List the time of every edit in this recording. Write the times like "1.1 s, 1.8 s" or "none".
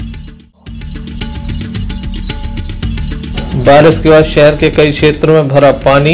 1.0 s